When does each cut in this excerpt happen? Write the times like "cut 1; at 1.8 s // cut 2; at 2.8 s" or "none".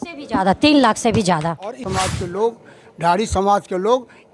cut 1; at 1.8 s